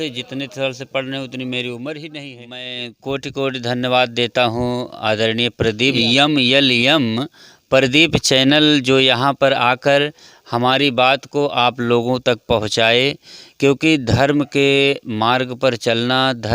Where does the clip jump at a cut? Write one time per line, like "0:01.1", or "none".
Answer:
0:02.7
0:06.0